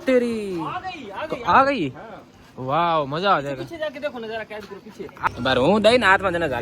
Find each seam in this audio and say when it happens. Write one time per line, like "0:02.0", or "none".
0:05.3